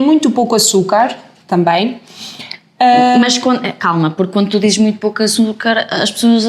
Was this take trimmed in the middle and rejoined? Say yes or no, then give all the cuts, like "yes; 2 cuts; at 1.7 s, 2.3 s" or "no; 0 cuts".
no; 0 cuts